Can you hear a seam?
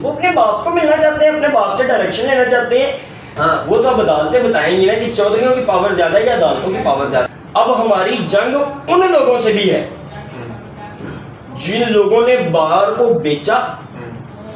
yes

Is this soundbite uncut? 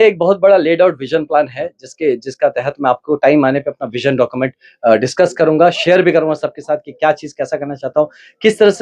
yes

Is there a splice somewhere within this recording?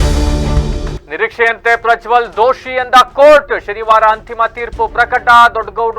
yes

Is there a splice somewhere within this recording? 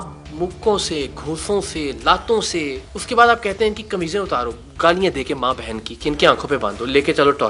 no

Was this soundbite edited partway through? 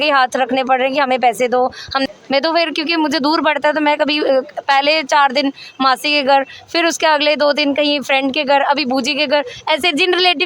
yes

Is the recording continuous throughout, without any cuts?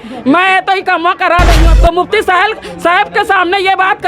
no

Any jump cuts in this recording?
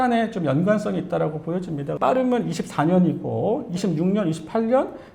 yes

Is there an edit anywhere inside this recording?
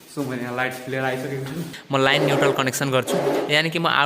yes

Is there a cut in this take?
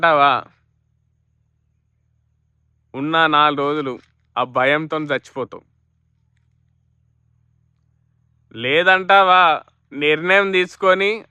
no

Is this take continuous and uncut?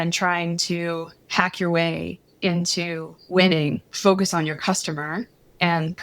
no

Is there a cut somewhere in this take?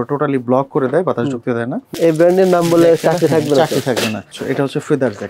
yes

